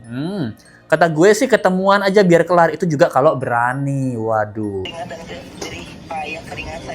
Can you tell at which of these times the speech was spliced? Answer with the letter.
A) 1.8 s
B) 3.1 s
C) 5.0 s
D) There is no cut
C